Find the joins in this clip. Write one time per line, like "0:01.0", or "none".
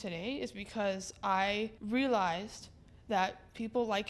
0:01.8

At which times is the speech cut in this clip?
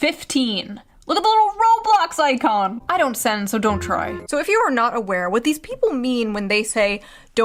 0:04.2

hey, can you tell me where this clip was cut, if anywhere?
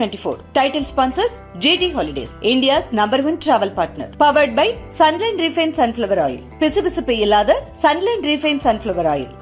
none

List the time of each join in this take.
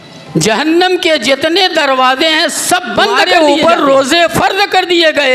0:03.3

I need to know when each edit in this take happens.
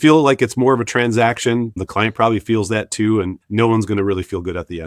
none

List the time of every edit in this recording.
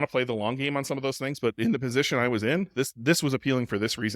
none

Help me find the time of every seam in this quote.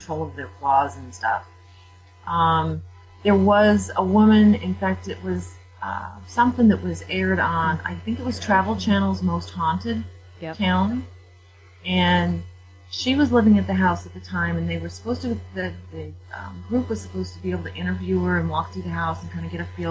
0:14.8

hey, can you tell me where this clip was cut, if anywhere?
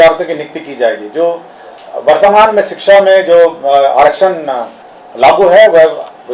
none

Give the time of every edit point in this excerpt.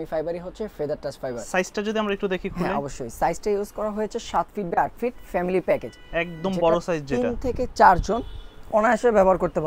none

